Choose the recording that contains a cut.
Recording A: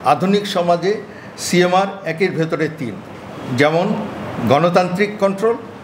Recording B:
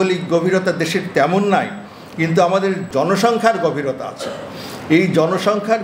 B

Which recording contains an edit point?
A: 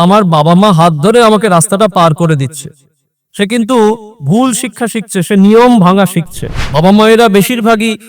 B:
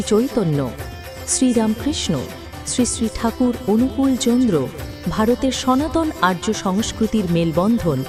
A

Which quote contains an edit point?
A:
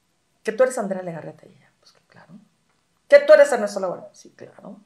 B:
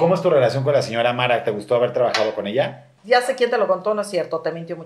B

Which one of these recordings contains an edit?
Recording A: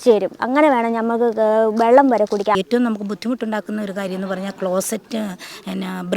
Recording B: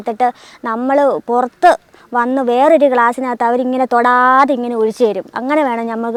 A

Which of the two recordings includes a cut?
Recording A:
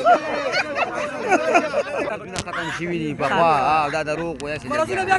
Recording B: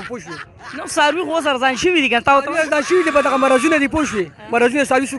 A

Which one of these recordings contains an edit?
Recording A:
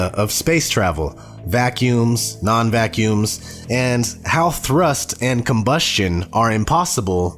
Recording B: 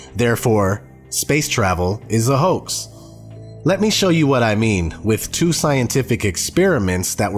A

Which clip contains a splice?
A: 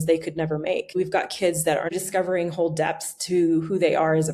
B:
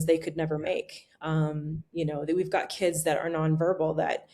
A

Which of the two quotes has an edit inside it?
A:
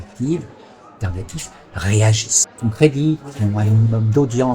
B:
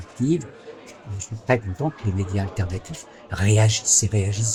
A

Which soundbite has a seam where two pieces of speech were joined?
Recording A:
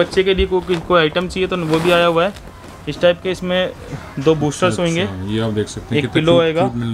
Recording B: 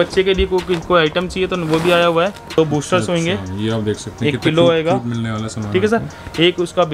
B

